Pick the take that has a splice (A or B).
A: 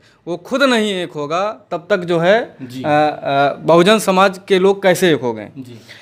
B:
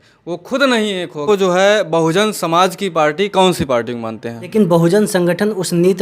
B